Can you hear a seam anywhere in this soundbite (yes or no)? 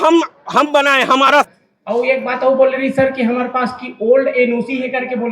yes